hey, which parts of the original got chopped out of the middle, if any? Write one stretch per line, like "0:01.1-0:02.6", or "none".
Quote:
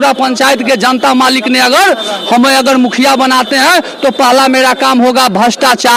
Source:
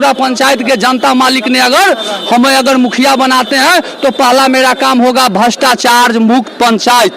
none